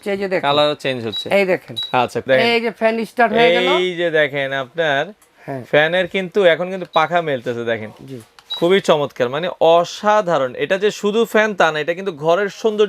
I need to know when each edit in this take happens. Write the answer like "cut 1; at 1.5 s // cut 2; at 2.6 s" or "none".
cut 1; at 2.2 s